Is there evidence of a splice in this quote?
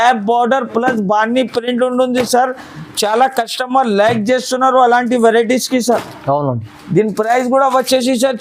no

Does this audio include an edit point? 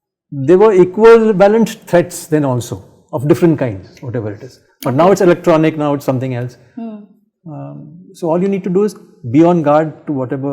no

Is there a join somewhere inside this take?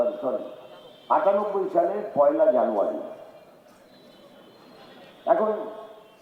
no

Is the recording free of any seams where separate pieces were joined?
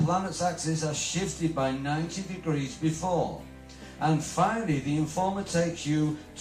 no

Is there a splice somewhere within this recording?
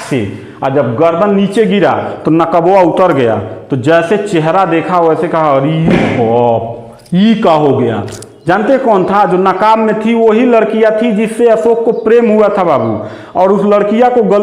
no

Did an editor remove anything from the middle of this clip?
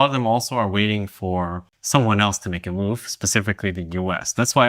no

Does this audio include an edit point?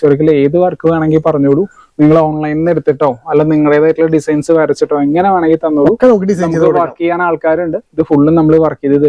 no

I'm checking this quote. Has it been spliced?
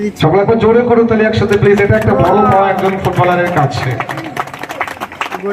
no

